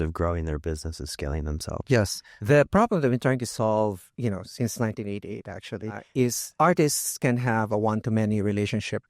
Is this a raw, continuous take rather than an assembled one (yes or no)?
no